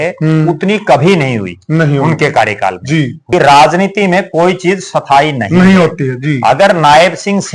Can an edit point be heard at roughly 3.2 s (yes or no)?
yes